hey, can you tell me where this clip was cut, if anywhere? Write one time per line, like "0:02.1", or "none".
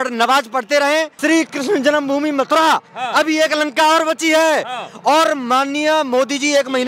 0:01.1